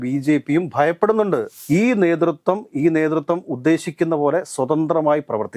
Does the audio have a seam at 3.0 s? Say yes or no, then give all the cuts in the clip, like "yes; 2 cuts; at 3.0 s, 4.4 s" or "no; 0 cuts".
no; 1 cut; at 1.5 s